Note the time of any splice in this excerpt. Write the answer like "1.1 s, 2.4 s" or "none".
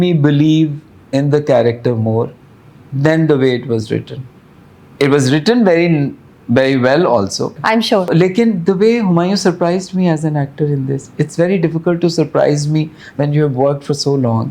none